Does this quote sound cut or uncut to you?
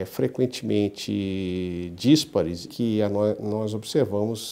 cut